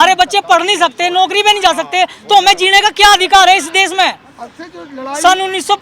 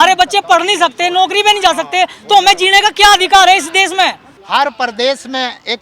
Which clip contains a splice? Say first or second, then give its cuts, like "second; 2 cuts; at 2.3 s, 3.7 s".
second; 1 cut; at 4.3 s